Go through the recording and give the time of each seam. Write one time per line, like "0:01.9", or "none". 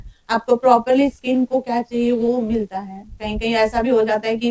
none